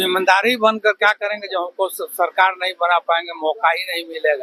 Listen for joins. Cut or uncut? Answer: uncut